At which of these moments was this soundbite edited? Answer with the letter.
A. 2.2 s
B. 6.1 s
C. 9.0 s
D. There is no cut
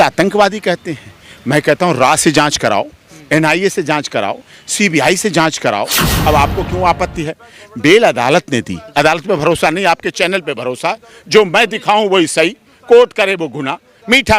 B